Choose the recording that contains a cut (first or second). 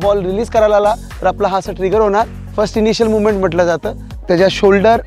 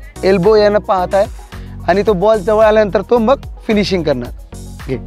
first